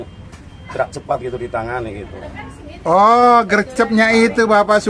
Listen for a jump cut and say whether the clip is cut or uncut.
uncut